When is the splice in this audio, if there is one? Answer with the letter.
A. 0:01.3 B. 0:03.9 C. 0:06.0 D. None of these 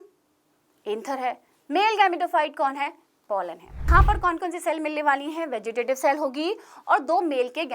B